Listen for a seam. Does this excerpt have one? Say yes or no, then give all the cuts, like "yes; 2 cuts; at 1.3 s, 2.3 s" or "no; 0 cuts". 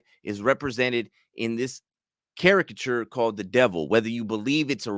no; 0 cuts